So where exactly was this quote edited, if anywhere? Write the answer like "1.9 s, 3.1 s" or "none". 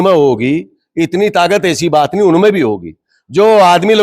none